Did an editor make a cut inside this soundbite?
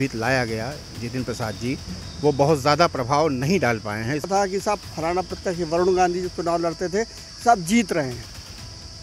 yes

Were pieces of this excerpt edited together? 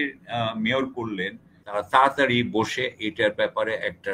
yes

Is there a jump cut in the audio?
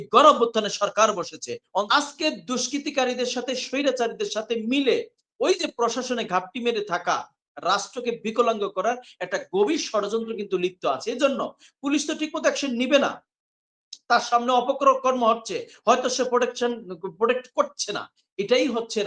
yes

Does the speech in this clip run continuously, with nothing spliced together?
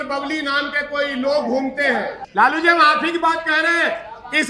no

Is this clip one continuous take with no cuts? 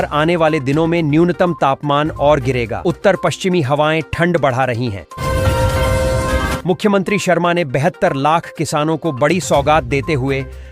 no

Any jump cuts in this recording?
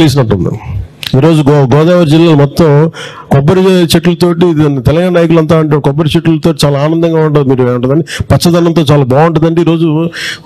no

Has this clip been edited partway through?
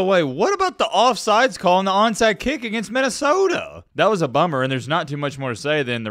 no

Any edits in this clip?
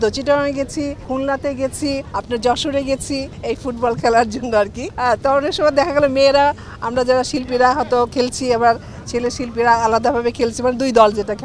yes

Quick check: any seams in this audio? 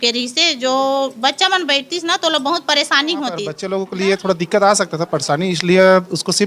yes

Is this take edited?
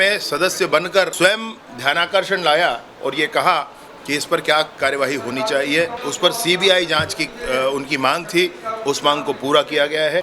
yes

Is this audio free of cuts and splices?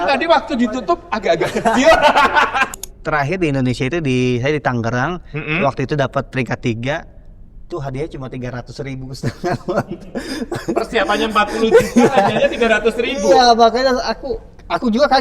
no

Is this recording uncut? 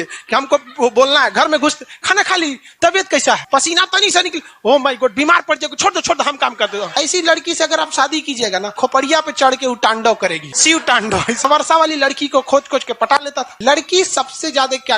no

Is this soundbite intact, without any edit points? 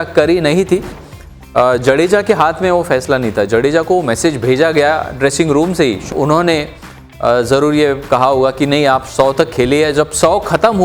no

